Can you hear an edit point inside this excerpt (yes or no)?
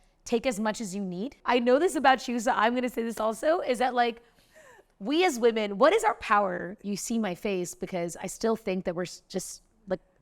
yes